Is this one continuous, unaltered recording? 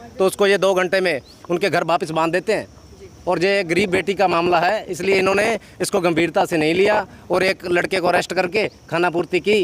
yes; 0 cuts

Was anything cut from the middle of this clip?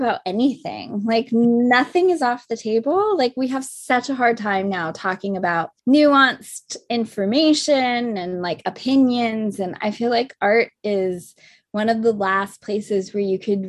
yes; 1 cut; at 5.7 s

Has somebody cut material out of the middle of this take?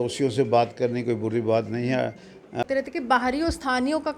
yes; 1 cut; at 2.6 s

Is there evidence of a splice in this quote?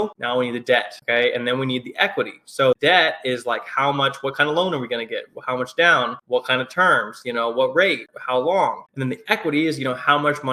yes; 1 cut; at 8.9 s

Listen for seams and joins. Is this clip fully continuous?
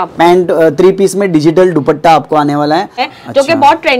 no; 1 cut; at 3.0 s

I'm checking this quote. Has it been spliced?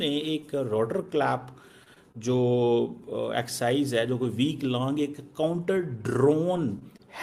no; 0 cuts

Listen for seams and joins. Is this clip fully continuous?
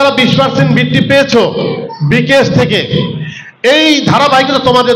yes; 0 cuts

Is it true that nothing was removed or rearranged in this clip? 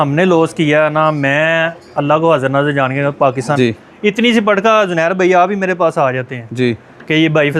no; 1 cut; at 3.6 s

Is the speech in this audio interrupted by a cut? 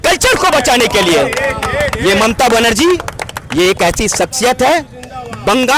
no; 0 cuts

